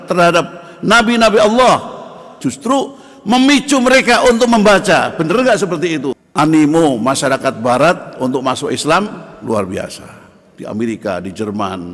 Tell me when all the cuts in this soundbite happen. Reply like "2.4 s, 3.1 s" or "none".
2.3 s, 6.2 s